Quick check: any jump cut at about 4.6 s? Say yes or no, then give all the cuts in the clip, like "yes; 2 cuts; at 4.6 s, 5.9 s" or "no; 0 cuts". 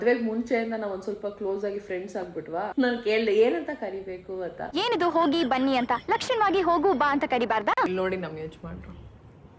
yes; 3 cuts; at 2.7 s, 4.6 s, 7.9 s